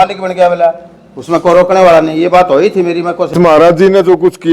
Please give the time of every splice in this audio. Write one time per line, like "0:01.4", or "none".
0:03.3